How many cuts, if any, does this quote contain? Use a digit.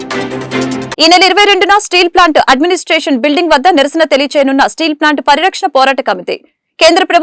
1